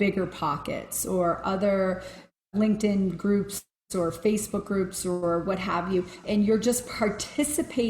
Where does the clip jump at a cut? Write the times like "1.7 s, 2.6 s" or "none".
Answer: 2.1 s, 6.2 s